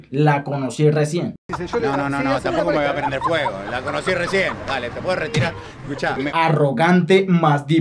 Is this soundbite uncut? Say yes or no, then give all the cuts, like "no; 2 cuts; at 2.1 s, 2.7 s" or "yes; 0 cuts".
no; 2 cuts; at 1.5 s, 5.4 s